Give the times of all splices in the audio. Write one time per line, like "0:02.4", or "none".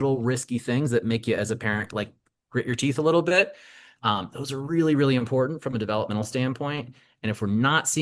none